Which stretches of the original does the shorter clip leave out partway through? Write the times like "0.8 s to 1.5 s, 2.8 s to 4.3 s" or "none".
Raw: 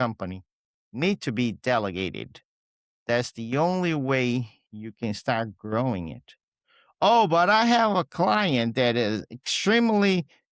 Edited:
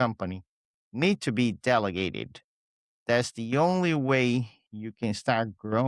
none

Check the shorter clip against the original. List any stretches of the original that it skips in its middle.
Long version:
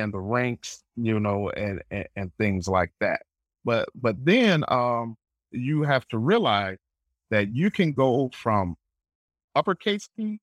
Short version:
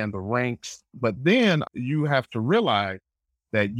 0.9 s to 3.9 s, 4.6 s to 5.4 s

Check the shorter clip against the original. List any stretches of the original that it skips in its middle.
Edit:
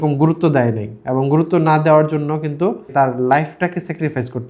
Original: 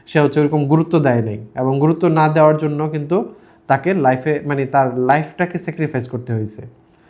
3.4 s to 4.7 s

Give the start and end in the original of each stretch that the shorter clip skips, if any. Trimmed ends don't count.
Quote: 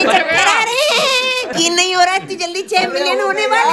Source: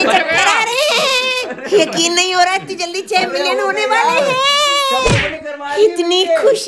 1.5 s to 1.9 s

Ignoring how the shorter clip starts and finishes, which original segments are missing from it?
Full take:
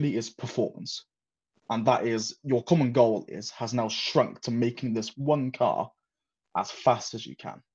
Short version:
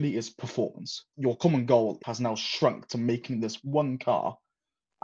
1.1 s to 2.3 s, 3.3 s to 3.6 s

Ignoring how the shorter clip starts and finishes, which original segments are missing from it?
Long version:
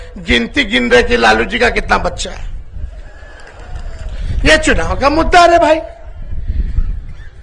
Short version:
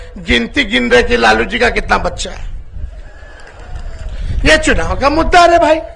none

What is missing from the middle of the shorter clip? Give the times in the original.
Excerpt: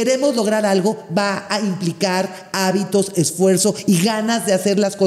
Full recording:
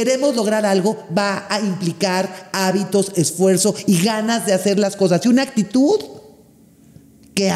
none

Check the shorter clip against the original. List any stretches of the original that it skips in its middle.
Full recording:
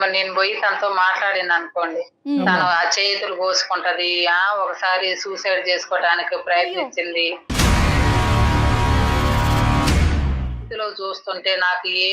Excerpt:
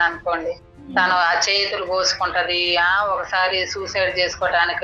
none

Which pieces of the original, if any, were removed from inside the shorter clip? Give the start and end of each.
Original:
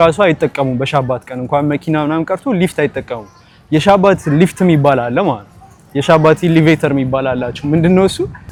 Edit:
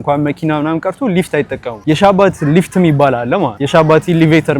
3.1 s to 3.5 s, 5.4 s to 5.9 s

